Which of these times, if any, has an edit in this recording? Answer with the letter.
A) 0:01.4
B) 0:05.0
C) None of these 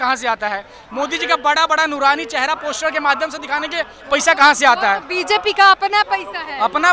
C